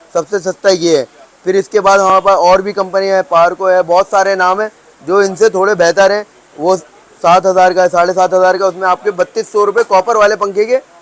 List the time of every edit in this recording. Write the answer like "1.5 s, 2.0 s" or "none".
none